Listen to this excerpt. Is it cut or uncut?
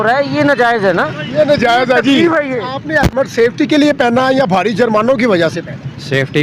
uncut